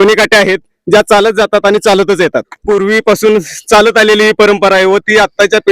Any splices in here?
yes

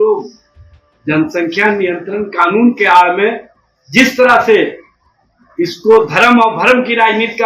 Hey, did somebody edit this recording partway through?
no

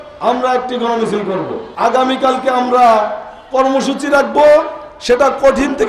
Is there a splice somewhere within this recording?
yes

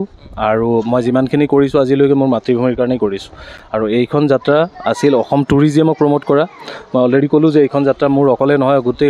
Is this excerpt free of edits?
yes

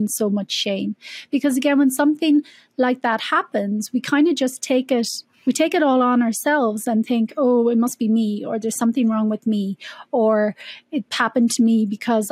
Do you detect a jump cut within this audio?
no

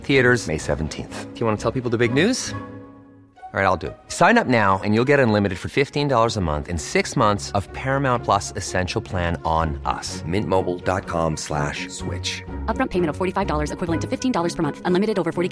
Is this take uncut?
yes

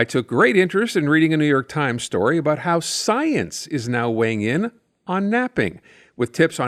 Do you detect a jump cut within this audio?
no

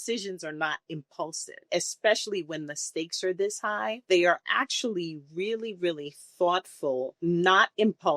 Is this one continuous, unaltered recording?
no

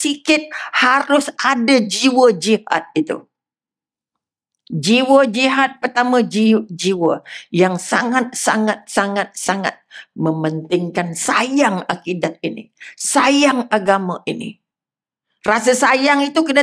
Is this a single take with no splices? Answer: yes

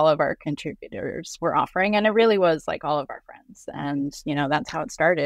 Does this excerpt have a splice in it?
yes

